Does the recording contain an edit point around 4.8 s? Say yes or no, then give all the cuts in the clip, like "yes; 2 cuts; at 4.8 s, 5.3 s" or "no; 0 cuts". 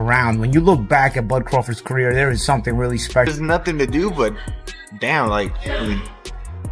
no; 1 cut; at 3.3 s